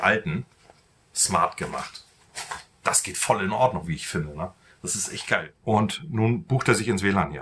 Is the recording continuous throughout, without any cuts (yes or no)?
no